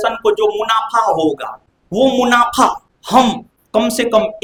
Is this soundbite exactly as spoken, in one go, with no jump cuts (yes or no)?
yes